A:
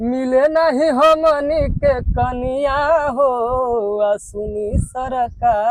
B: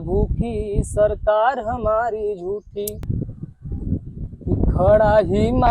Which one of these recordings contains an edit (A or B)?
B